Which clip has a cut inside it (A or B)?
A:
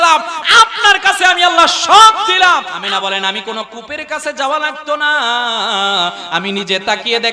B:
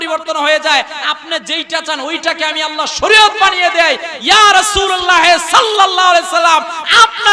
A